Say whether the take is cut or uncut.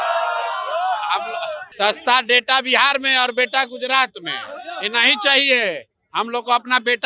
cut